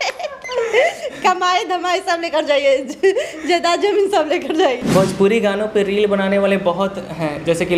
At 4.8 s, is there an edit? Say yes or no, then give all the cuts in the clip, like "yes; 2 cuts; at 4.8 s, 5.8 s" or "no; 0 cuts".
yes; 1 cut; at 4.8 s